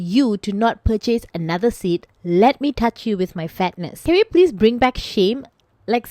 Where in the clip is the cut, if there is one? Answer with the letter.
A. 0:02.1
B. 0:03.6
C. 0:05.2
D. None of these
A